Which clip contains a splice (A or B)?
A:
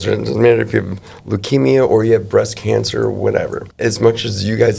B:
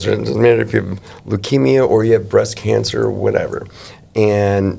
A